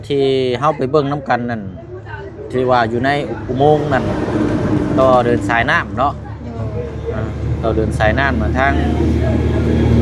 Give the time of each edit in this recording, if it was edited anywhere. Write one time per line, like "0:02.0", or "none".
none